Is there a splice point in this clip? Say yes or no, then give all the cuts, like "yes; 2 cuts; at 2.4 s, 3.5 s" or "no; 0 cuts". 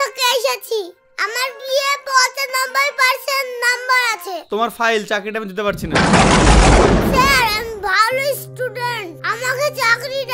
yes; 1 cut; at 4.4 s